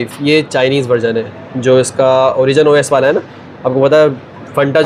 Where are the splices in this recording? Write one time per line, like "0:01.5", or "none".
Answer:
none